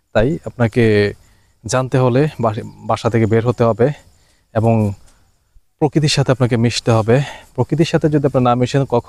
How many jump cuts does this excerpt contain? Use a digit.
0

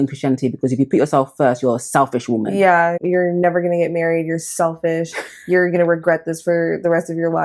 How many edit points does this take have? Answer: 1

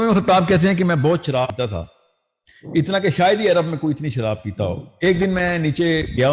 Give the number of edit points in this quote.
1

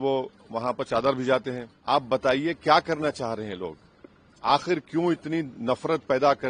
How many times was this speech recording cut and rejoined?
1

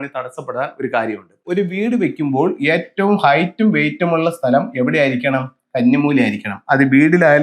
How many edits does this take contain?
1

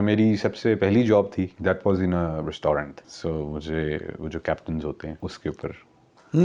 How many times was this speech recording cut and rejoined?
3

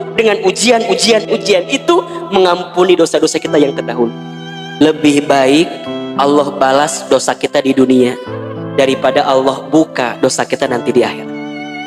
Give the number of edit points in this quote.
2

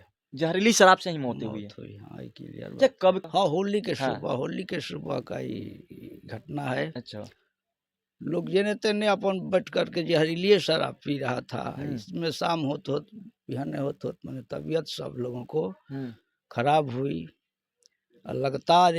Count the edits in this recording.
1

